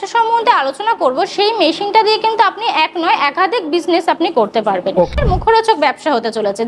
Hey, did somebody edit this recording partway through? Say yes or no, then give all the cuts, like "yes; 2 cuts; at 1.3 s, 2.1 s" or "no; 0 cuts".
yes; 1 cut; at 5.1 s